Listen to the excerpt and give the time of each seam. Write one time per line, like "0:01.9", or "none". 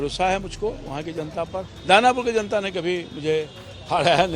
0:01.7